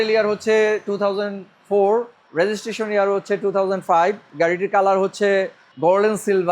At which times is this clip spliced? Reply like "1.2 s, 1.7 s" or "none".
2.2 s, 5.6 s